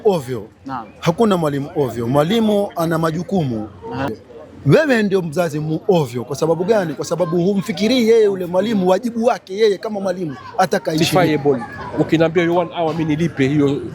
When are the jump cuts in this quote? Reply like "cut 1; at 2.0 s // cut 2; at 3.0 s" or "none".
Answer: cut 1; at 4.2 s // cut 2; at 11.0 s

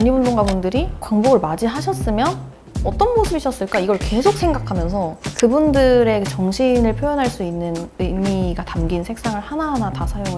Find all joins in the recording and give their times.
cut 1; at 1.0 s // cut 2; at 5.2 s

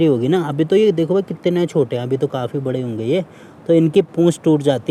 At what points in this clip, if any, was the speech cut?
none

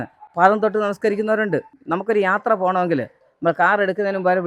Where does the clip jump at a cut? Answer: cut 1; at 1.8 s

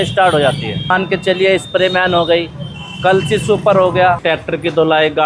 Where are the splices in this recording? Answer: cut 1; at 0.9 s // cut 2; at 4.2 s

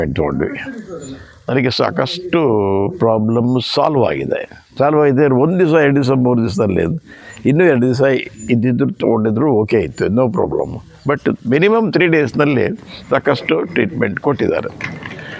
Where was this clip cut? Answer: none

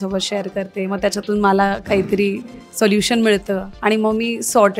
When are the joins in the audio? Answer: none

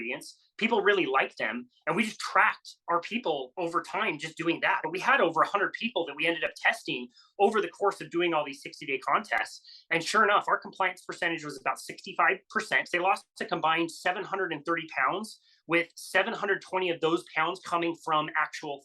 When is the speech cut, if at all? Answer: cut 1; at 4.8 s // cut 2; at 12.9 s

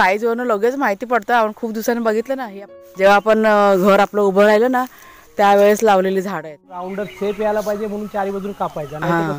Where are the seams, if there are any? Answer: cut 1; at 2.6 s // cut 2; at 6.9 s

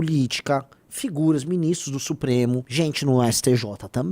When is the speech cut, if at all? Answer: cut 1; at 2.7 s

